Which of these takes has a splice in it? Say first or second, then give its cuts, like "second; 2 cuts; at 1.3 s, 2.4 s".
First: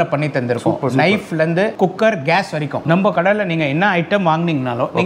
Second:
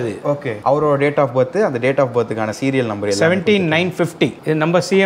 first; 1 cut; at 2.8 s